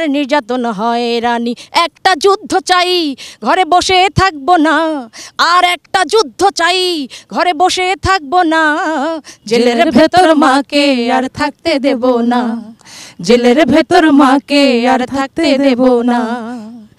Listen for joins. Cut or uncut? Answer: uncut